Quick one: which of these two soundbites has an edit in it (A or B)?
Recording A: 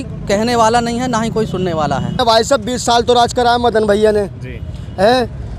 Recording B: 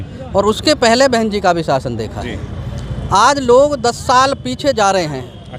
A